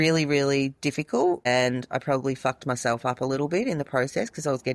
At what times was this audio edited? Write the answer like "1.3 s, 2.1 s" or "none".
1.4 s